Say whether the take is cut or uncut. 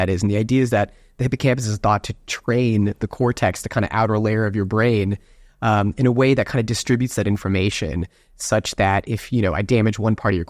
uncut